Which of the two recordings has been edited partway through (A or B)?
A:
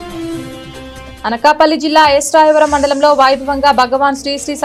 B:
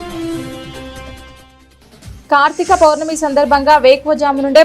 B